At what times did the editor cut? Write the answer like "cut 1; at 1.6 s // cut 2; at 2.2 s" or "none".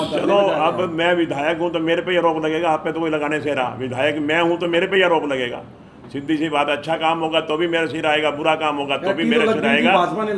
none